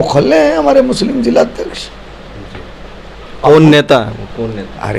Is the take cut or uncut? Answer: uncut